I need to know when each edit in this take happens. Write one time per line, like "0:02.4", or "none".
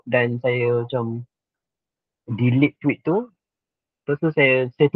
none